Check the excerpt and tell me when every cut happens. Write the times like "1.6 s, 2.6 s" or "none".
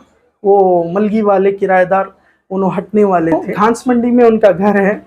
3.5 s